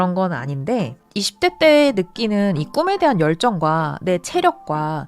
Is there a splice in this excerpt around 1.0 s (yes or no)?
yes